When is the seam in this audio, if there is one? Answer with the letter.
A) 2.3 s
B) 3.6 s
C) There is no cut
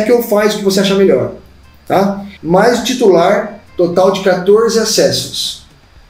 A